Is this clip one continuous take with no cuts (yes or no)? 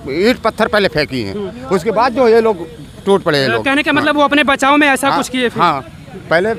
yes